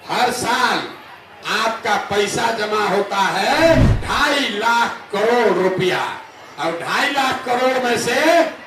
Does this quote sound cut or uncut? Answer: cut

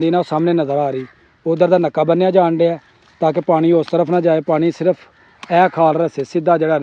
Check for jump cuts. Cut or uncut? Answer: uncut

